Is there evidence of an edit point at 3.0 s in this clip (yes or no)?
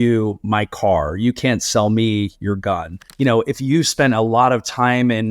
yes